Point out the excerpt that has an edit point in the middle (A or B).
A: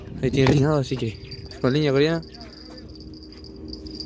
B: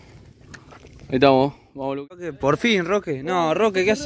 B